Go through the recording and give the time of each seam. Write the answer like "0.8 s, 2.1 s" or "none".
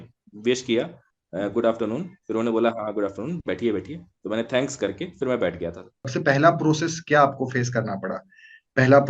6.1 s